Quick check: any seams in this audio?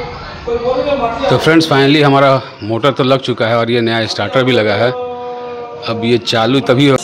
no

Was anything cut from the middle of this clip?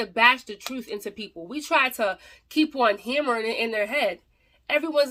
no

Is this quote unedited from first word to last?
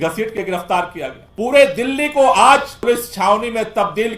no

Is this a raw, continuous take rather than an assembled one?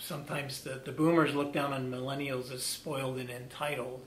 yes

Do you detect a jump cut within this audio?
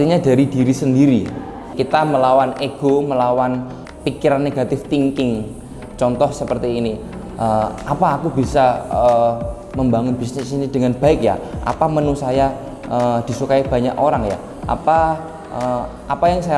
yes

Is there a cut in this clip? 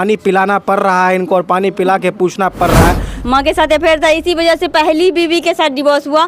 yes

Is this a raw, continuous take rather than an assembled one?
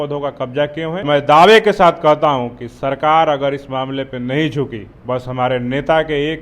no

